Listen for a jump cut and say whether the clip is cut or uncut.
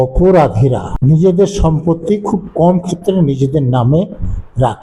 cut